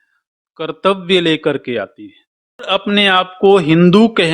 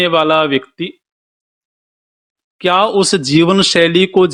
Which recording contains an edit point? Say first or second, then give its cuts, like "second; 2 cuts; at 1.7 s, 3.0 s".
first; 1 cut; at 2.7 s